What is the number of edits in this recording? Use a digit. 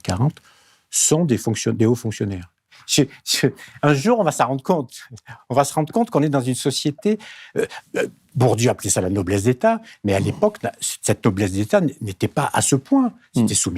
1